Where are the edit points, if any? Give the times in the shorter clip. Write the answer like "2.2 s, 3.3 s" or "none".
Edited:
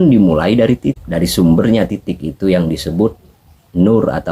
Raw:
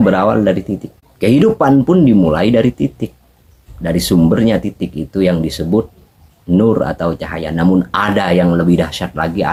1.0 s

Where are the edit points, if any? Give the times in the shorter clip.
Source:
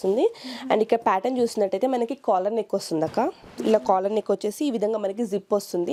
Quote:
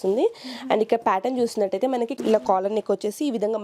2.1 s

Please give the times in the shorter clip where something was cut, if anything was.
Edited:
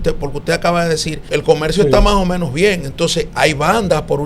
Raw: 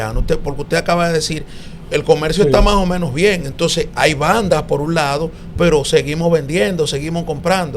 1.1 s

